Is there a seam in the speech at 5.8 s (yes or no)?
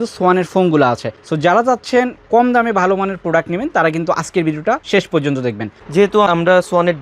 yes